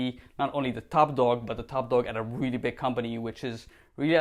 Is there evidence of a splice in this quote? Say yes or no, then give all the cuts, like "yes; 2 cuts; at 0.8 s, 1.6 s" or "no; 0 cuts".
no; 0 cuts